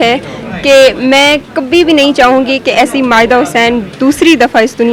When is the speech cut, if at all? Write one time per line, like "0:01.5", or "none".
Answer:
none